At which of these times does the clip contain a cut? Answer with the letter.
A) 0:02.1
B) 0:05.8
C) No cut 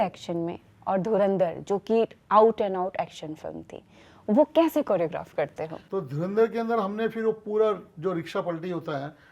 B